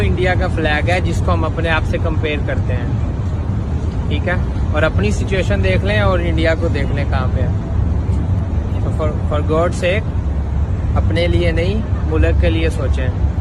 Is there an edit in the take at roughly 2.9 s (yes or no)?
no